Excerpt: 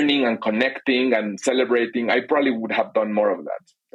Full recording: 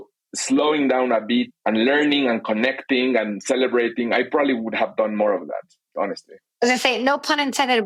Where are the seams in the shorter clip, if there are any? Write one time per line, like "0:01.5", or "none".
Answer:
none